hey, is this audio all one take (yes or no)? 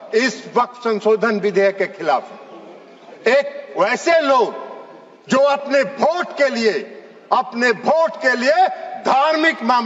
yes